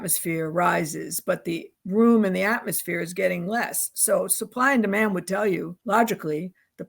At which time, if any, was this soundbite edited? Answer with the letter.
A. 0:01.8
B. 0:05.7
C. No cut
B